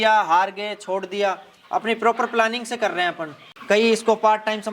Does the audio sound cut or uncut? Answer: cut